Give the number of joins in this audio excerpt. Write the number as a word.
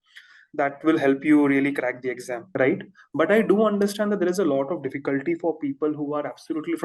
one